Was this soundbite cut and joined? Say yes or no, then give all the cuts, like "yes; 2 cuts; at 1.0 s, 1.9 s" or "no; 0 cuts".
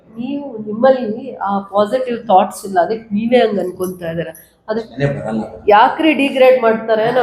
yes; 1 cut; at 4.9 s